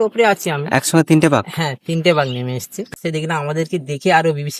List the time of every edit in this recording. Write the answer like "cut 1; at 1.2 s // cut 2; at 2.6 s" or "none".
cut 1; at 2.7 s